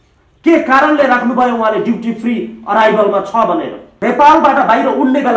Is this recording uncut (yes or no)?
no